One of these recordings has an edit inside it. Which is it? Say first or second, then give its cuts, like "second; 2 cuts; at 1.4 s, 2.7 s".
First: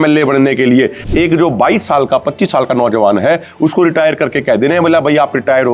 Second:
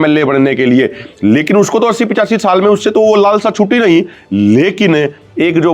first; 1 cut; at 1.0 s